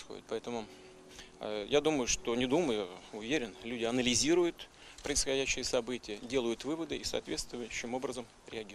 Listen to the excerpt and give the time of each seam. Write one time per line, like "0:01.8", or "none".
none